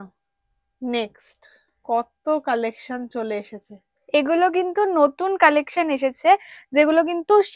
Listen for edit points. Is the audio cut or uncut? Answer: uncut